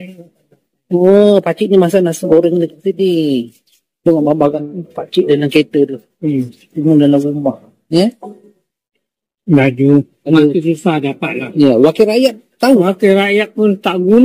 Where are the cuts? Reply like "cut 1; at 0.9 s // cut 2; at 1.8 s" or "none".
none